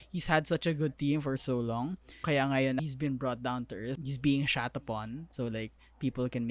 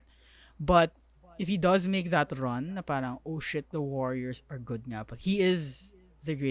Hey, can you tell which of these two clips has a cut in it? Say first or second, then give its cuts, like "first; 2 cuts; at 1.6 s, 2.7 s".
first; 3 cuts; at 2.2 s, 2.8 s, 4.0 s